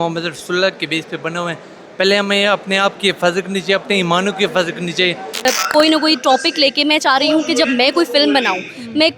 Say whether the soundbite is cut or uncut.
cut